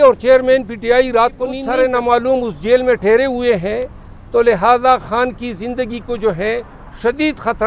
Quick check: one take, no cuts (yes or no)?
no